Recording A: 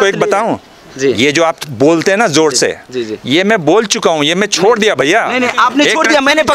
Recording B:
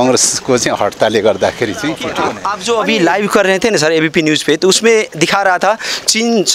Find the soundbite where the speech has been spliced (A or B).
B